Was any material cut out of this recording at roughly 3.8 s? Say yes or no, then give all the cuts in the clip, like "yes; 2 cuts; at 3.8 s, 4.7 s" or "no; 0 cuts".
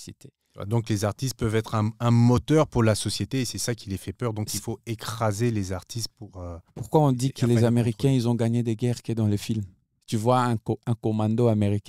no; 1 cut; at 6.6 s